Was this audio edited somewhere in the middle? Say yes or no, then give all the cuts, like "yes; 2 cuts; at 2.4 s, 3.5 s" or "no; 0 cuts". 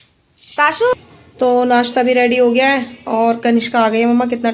yes; 1 cut; at 0.9 s